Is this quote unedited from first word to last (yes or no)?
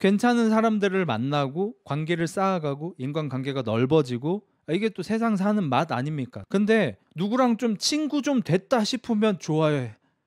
no